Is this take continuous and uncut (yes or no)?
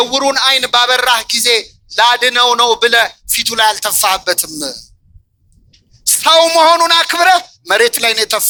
yes